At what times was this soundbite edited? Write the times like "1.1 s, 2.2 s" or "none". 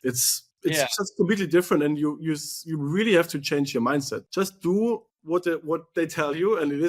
4.2 s